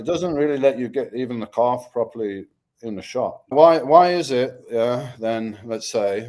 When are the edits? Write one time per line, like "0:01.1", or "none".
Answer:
0:03.5